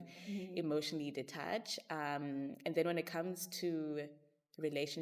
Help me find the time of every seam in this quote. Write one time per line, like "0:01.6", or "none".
none

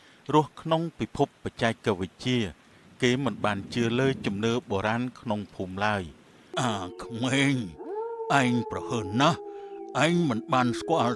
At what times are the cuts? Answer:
0:06.5

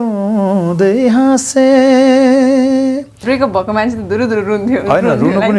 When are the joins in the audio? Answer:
0:03.1

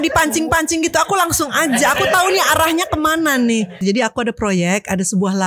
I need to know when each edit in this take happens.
0:03.8

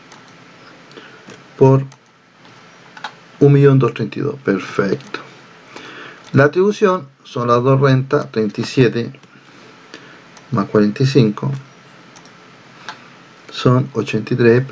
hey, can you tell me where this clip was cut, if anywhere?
none

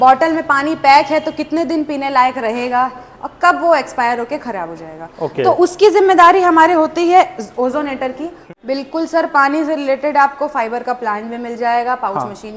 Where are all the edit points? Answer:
0:08.5

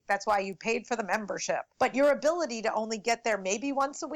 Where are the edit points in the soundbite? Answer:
0:01.7

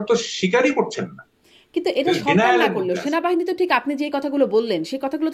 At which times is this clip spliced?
none

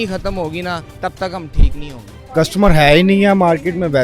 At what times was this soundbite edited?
0:00.9
0:02.2

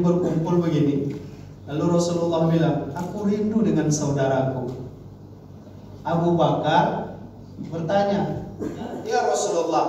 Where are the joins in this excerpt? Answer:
0:08.9

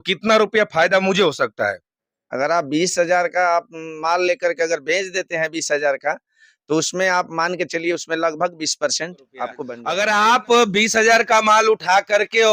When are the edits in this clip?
0:09.7

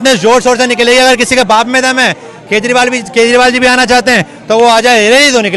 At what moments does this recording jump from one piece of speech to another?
none

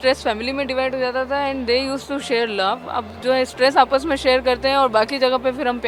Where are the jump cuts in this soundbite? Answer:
none

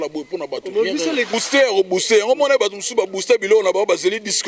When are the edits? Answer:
0:01.3

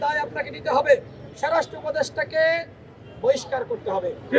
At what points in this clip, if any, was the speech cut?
0:01.3

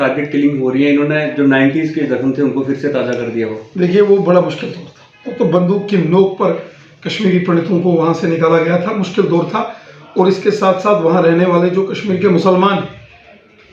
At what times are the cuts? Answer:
none

